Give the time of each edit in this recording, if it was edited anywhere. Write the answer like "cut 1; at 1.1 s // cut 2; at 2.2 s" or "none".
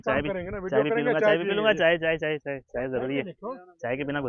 none